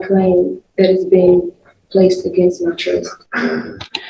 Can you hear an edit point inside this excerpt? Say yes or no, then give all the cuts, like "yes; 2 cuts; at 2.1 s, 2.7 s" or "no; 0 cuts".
no; 0 cuts